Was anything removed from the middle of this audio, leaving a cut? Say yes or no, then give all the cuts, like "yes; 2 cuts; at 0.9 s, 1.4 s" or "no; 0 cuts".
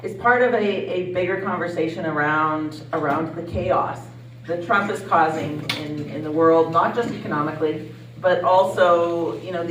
no; 0 cuts